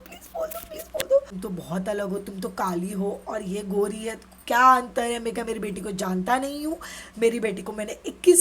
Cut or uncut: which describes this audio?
cut